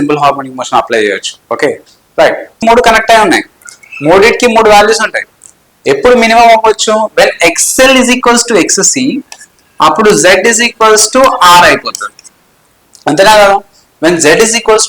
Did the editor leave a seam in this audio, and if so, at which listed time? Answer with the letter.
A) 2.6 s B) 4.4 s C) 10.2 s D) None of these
A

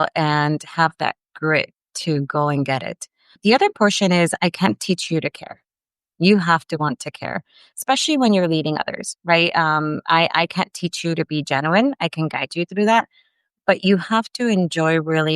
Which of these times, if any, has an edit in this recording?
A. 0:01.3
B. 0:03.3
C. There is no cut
B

